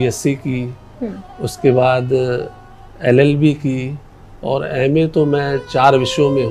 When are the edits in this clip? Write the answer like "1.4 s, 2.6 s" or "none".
none